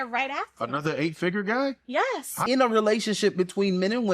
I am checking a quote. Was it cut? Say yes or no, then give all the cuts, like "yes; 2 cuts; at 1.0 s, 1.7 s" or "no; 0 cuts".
yes; 1 cut; at 2.4 s